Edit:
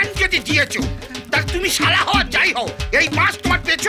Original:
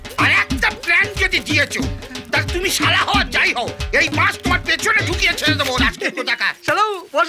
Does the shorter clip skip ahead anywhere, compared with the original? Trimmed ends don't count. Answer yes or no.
no